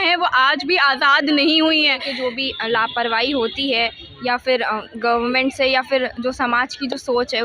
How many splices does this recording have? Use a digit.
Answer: 1